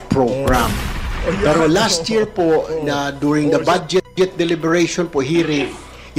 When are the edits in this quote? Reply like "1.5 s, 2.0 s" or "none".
4.1 s